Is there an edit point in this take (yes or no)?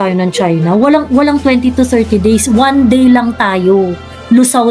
no